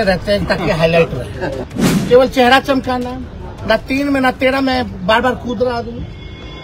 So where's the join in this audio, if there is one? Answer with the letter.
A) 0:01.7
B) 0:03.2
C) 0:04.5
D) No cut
A